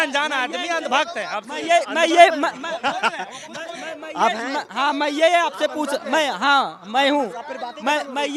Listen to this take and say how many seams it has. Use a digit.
0